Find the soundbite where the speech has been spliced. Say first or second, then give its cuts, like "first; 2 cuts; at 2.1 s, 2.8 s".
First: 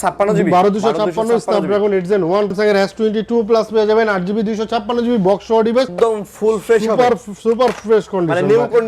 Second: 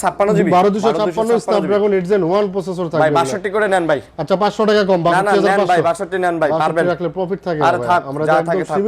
first; 2 cuts; at 2.5 s, 5.9 s